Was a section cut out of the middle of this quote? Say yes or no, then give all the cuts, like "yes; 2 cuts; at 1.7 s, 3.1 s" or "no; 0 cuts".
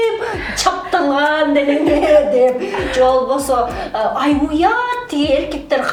no; 0 cuts